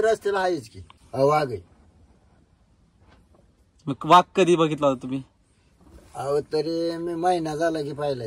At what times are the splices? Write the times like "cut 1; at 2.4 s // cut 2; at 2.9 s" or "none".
cut 1; at 0.9 s

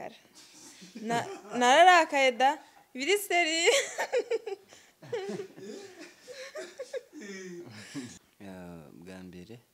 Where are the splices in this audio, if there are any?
cut 1; at 8.1 s

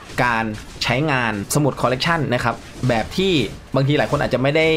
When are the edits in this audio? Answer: cut 1; at 1.4 s

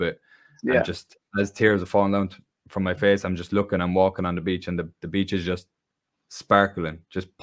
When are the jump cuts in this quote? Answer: none

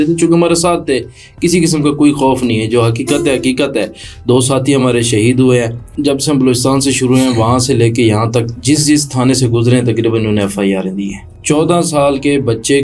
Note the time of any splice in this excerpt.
cut 1; at 5.9 s // cut 2; at 11.2 s

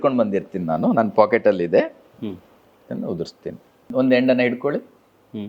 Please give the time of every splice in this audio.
cut 1; at 3.9 s

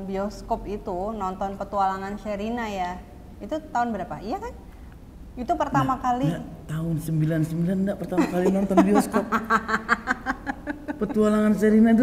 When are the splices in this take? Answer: none

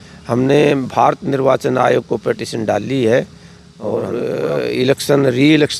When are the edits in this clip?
cut 1; at 4.1 s

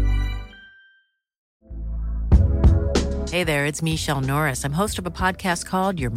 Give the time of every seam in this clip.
cut 1; at 1.5 s

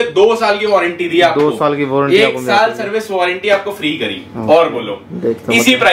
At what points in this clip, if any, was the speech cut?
none

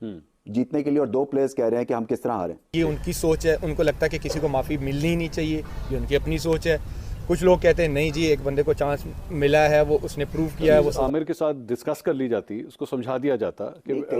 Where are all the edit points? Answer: cut 1; at 2.7 s // cut 2; at 10.9 s

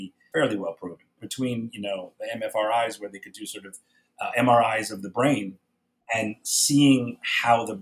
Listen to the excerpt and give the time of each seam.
cut 1; at 5.5 s

